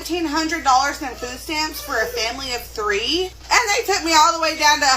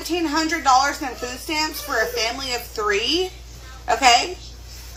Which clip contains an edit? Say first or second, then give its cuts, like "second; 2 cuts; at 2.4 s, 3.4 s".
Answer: first; 1 cut; at 3.4 s